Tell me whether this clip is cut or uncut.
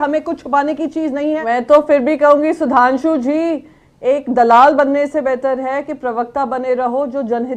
cut